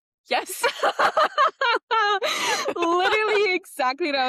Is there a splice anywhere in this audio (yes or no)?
no